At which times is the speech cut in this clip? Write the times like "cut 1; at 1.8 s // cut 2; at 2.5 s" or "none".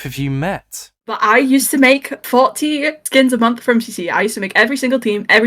cut 1; at 1.2 s